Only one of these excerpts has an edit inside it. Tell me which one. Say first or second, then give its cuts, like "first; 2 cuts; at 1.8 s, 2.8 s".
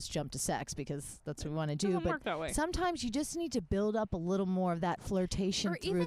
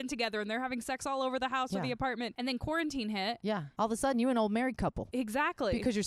second; 3 cuts; at 2.3 s, 3.7 s, 5.0 s